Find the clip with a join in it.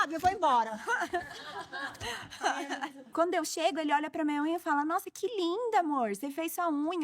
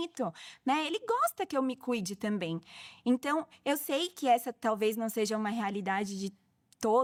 first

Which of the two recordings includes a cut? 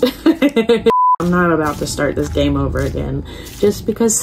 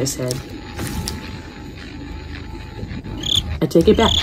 first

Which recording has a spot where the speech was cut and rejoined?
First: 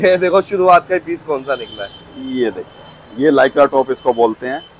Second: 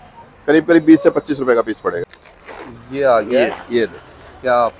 second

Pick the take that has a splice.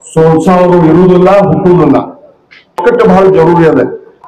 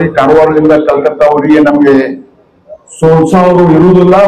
first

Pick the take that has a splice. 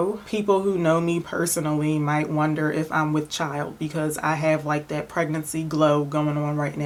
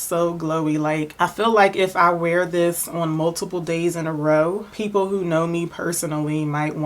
second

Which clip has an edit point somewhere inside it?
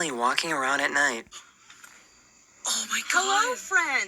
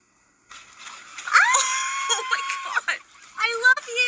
first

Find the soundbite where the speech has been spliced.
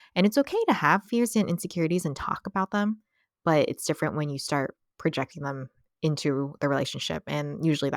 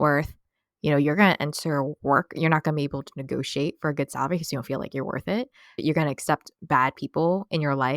second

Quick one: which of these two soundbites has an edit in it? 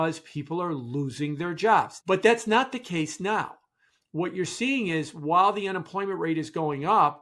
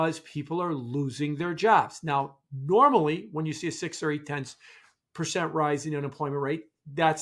first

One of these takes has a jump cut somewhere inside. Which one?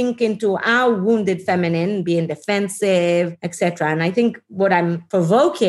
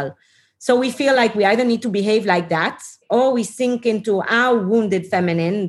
first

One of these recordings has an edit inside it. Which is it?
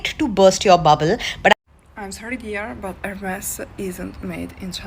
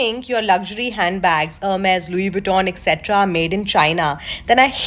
first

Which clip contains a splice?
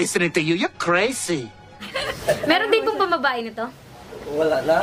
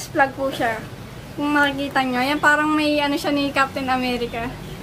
first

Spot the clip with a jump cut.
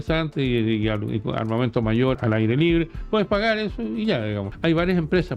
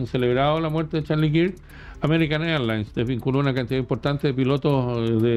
first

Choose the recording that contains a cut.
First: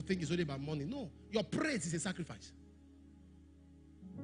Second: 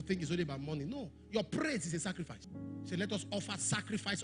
second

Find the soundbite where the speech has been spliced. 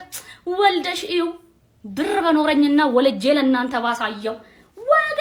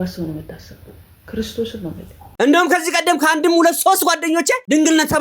second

